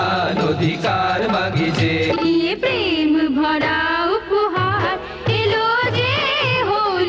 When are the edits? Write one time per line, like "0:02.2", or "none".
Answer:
none